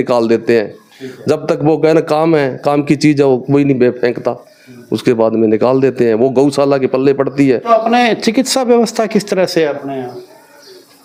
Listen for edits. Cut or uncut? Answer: uncut